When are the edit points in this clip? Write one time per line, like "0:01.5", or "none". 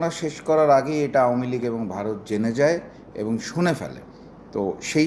none